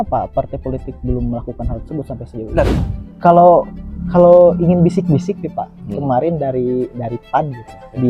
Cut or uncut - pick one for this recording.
cut